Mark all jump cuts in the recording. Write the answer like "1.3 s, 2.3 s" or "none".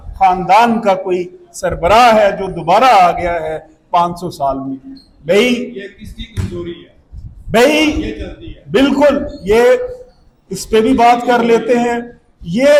none